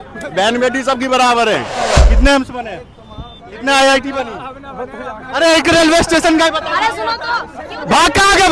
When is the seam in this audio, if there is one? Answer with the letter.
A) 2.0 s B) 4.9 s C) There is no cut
A